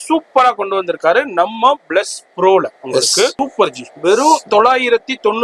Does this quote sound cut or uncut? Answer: cut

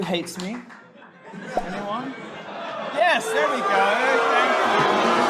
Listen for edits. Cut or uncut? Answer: uncut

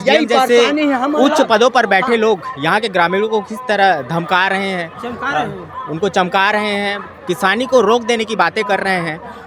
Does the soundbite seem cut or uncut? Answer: uncut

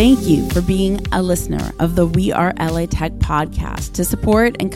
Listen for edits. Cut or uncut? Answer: uncut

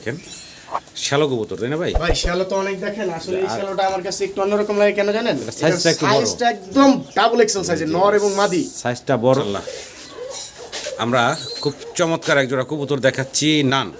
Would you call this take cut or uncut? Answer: cut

